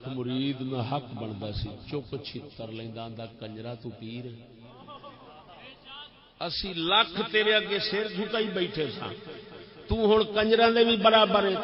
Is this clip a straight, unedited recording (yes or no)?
yes